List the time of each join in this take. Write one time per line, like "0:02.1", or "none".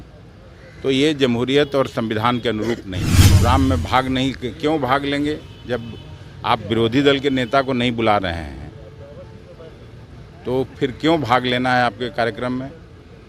0:03.4